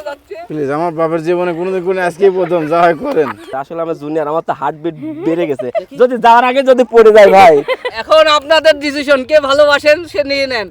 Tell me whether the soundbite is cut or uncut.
cut